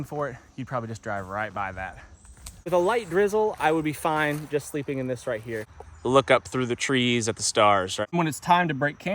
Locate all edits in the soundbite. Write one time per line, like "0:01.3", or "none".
0:02.7
0:05.6
0:08.0